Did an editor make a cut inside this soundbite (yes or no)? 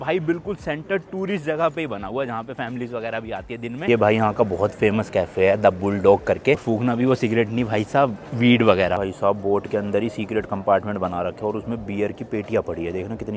yes